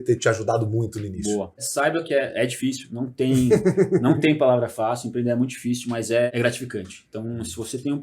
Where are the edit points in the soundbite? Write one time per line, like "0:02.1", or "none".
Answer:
0:01.7
0:06.3